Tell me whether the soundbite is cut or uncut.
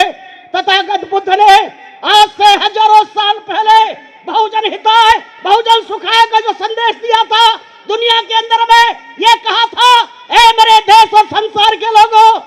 uncut